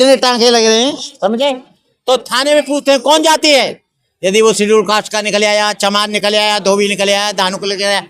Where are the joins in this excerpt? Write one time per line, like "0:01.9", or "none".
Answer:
0:01.8